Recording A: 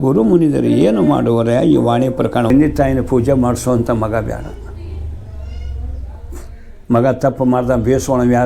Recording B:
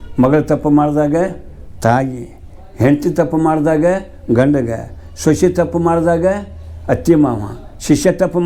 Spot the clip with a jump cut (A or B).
A